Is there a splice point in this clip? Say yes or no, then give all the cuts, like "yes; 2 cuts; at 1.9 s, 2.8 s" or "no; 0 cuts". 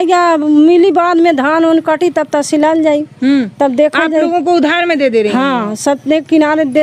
no; 0 cuts